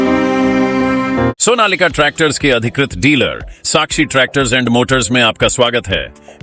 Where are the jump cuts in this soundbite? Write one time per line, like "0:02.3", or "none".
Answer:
0:01.3